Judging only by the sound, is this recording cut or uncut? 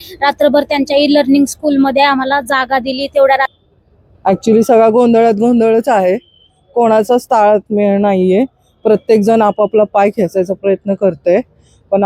cut